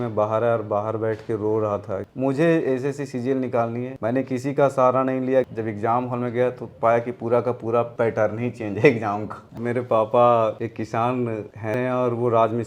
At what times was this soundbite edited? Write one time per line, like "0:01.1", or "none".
0:02.0
0:05.5
0:09.6
0:11.7